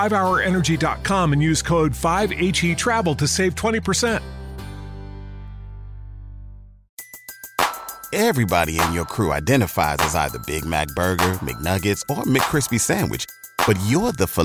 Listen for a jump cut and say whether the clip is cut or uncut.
cut